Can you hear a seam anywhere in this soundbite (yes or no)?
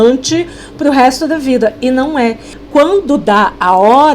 yes